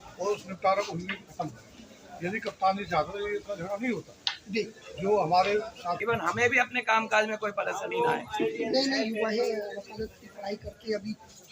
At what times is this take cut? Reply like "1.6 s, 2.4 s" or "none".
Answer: 6.0 s